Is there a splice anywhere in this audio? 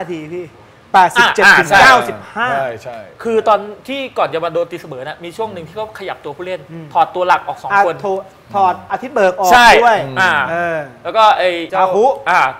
yes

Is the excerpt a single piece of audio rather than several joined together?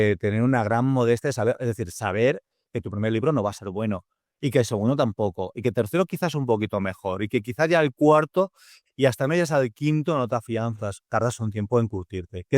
no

